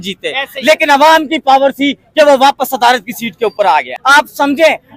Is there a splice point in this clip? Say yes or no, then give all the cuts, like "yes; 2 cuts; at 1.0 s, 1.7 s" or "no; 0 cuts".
yes; 1 cut; at 4.0 s